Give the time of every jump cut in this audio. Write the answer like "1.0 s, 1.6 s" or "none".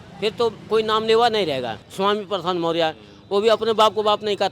1.8 s